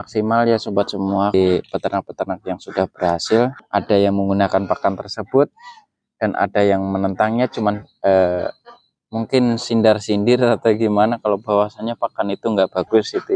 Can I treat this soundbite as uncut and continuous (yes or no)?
no